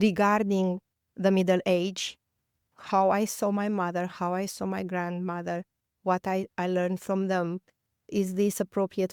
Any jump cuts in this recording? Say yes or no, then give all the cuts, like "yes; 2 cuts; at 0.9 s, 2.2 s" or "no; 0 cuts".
no; 0 cuts